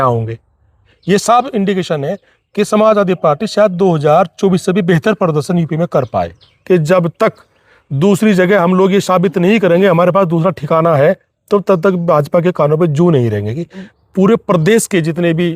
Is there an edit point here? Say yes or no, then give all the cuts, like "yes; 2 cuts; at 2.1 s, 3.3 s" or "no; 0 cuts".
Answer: yes; 3 cuts; at 0.9 s, 6.5 s, 13.9 s